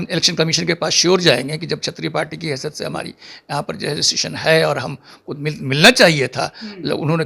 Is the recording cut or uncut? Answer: uncut